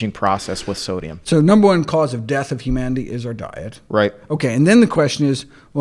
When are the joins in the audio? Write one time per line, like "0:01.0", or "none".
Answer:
0:01.1